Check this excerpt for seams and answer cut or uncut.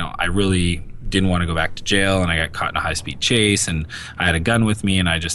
uncut